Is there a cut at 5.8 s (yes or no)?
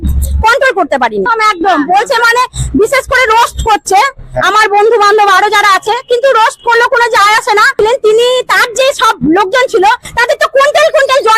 no